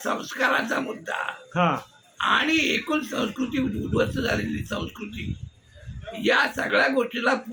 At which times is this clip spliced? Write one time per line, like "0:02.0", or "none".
none